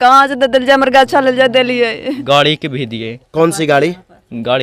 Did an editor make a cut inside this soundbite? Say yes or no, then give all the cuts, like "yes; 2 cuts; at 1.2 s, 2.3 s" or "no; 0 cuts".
yes; 1 cut; at 2.2 s